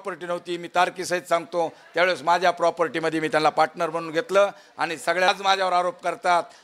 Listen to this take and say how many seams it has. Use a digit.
1